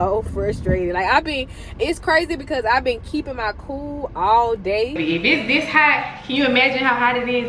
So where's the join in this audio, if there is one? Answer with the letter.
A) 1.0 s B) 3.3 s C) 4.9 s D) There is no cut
C